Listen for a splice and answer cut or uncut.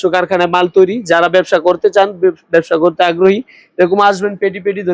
uncut